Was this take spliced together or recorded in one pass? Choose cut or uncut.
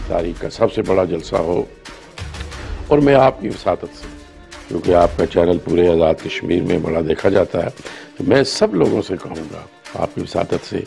uncut